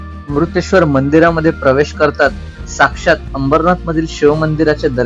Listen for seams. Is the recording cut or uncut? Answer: uncut